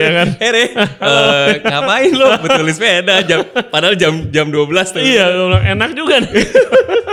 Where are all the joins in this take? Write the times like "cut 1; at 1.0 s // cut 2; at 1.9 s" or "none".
none